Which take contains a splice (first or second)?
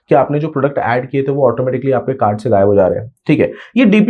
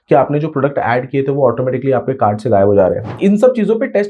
second